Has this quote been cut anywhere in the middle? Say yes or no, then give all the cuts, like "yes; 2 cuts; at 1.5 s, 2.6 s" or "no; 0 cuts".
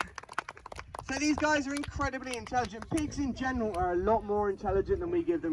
no; 0 cuts